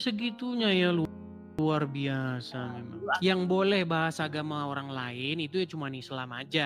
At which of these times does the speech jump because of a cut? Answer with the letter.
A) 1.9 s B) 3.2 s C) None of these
B